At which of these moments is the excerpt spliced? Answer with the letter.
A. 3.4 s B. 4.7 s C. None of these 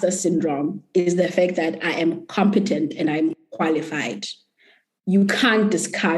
A